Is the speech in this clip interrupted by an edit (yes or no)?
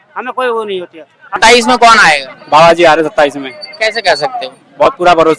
yes